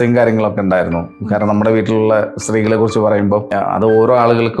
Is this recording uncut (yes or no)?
no